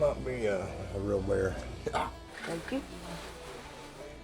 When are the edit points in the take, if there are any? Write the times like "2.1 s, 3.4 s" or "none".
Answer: 2.3 s